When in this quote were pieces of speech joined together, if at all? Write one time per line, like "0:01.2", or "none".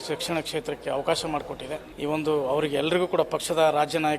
0:01.9